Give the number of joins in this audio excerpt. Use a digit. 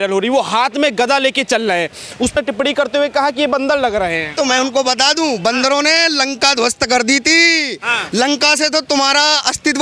0